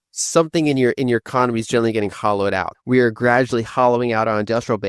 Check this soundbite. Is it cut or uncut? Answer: cut